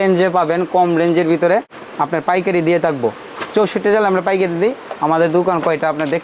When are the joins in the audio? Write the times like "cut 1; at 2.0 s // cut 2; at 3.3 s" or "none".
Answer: none